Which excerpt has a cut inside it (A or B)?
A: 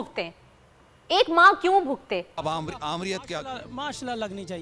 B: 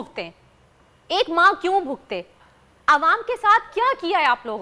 A